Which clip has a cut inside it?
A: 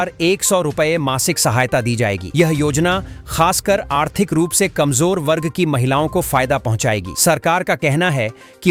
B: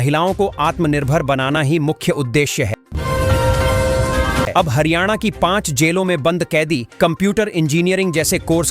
B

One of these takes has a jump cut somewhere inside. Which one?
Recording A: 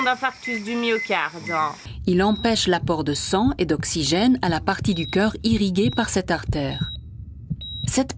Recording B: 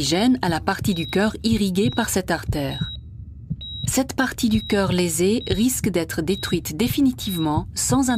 A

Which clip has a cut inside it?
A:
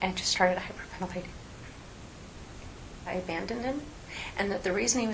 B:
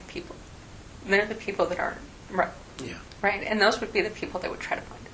A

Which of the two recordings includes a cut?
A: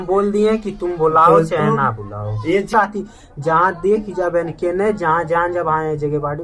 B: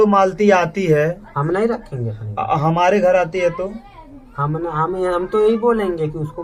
A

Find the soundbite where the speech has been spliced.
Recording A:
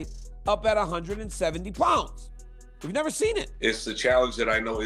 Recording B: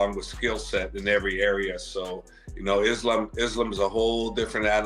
A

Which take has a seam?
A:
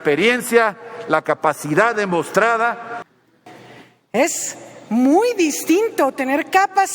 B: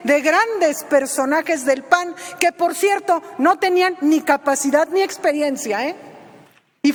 A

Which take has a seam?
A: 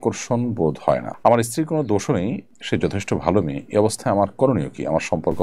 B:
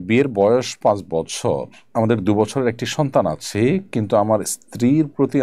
A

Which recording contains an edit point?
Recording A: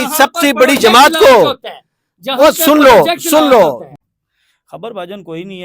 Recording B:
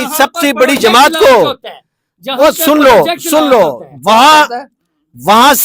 A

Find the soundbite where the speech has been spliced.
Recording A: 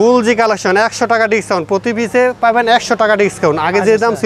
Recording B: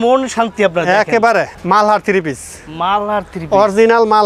B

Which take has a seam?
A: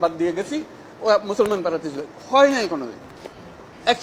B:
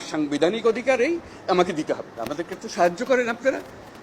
B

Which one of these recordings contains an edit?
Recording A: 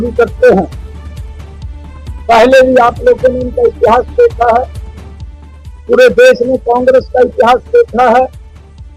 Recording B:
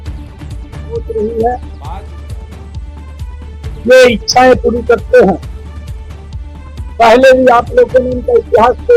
B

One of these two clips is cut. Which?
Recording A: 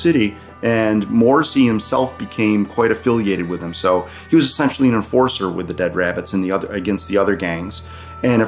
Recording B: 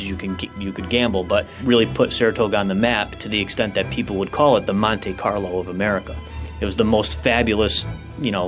B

